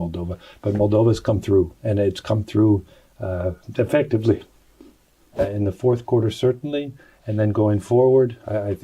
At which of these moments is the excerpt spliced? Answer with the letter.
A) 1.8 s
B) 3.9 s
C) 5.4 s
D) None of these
C